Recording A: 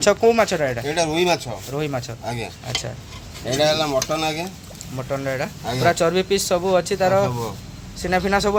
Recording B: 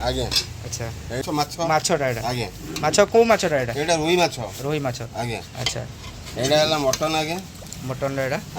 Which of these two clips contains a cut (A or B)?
B